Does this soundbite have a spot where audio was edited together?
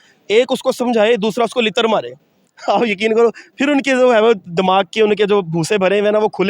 no; 0 cuts

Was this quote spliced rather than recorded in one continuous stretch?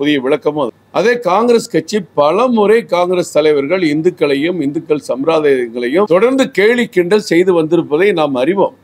no; 0 cuts

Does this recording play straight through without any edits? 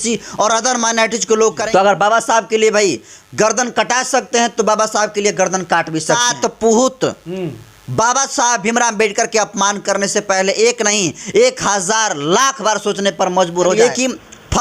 no; 3 cuts; at 1.6 s, 6.1 s, 13.7 s

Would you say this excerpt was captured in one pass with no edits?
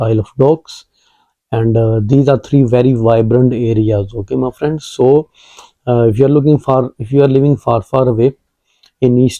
yes; 0 cuts

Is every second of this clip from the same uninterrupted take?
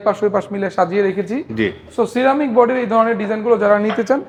yes; 0 cuts

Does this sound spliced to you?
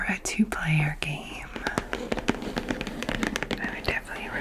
no; 0 cuts

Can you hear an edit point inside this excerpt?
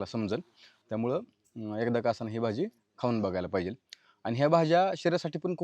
no; 0 cuts

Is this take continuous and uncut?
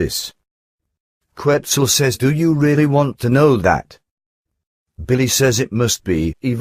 yes; 0 cuts

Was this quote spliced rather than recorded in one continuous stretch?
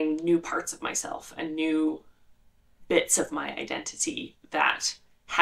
no; 0 cuts

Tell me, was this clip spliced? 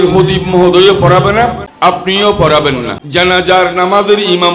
yes; 2 cuts; at 1.7 s, 3.0 s

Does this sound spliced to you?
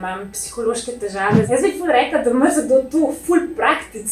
yes; 1 cut; at 1.5 s

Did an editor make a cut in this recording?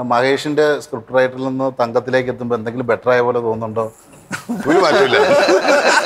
no; 0 cuts

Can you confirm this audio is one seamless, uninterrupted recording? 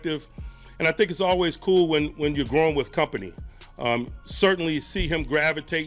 yes; 0 cuts

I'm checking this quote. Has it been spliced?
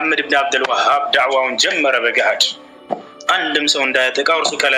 no; 0 cuts

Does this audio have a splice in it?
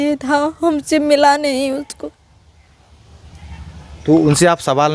no; 0 cuts

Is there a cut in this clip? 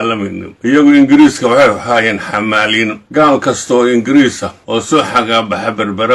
yes; 3 cuts; at 0.7 s, 3.0 s, 4.8 s

